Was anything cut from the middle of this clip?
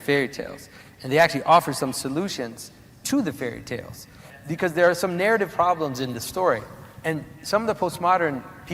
yes; 1 cut; at 4.3 s

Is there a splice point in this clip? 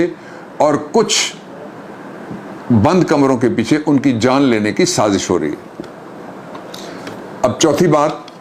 no; 0 cuts

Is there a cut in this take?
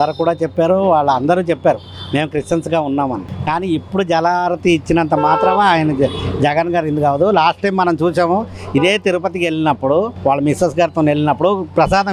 no; 0 cuts

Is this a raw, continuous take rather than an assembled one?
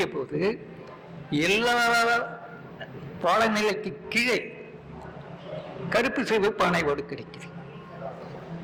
yes; 0 cuts

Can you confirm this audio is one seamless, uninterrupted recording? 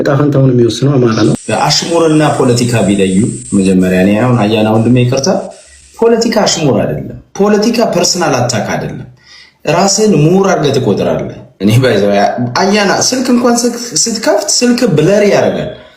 no; 1 cut; at 1.4 s

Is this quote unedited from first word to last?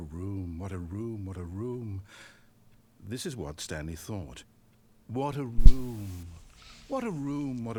yes; 0 cuts

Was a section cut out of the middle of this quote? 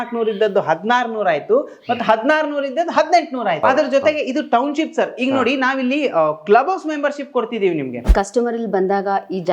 yes; 2 cuts; at 3.6 s, 8.1 s

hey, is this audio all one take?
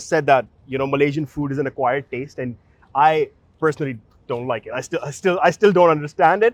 yes; 0 cuts

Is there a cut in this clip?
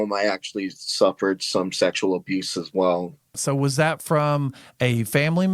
yes; 1 cut; at 3.3 s

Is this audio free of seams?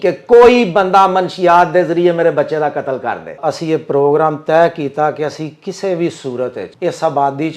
no; 2 cuts; at 3.4 s, 6.7 s

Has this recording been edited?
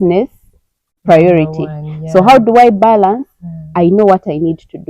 no; 0 cuts

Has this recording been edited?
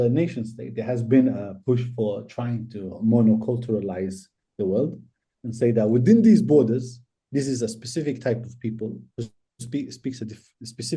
no; 0 cuts

